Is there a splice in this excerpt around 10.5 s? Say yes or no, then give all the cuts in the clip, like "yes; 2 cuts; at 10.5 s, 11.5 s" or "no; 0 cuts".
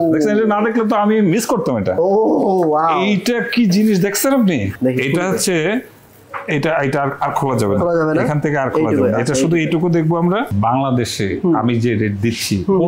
yes; 2 cuts; at 4.7 s, 10.5 s